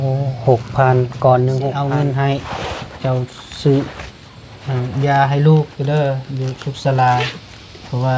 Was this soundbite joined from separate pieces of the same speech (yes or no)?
yes